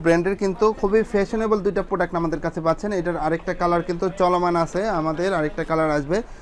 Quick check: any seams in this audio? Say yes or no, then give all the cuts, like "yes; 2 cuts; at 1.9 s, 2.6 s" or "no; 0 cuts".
no; 0 cuts